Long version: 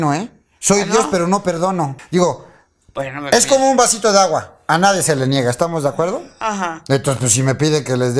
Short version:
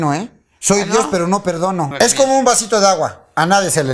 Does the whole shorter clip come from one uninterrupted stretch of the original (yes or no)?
no